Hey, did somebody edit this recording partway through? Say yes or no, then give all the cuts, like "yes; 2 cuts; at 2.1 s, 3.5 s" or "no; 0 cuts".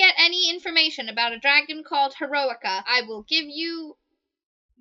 yes; 1 cut; at 2.8 s